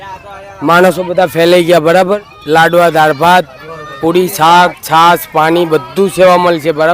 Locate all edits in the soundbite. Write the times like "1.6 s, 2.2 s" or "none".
2.3 s